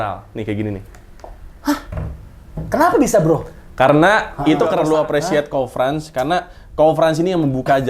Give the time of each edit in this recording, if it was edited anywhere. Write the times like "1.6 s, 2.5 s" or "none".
4.7 s